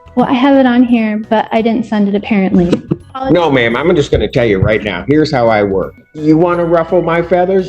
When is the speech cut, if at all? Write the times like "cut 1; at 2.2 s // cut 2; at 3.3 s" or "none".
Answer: cut 1; at 3.1 s // cut 2; at 6.0 s